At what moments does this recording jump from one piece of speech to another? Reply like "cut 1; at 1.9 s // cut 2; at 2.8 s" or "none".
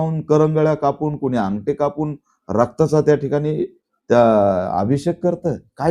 none